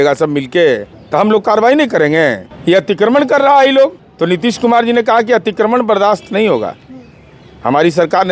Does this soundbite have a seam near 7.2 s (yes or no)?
no